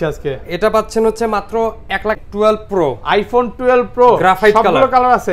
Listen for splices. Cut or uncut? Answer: cut